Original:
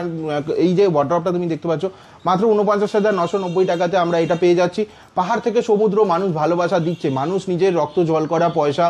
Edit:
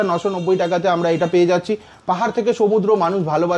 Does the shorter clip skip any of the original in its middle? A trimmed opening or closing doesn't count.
no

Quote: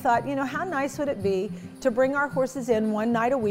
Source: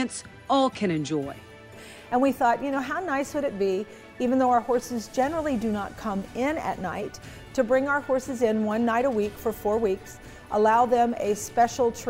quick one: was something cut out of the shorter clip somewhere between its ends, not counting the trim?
yes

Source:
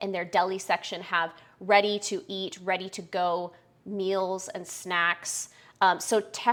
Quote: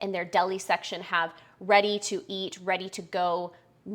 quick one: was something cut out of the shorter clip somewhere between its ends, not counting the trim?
no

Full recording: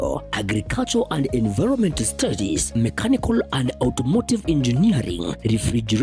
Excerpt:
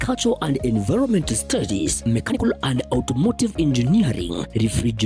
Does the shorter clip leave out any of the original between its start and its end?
yes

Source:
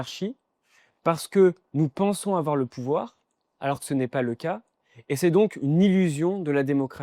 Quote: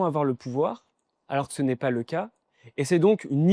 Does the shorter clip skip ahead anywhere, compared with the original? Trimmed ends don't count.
no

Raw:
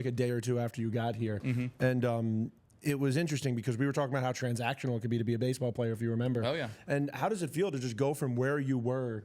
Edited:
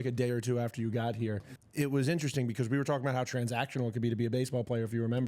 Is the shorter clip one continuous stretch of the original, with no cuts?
no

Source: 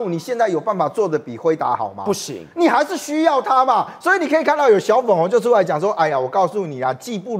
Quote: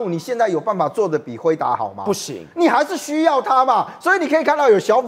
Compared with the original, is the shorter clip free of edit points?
yes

